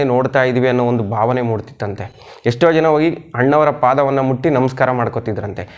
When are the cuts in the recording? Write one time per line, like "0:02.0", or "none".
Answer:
none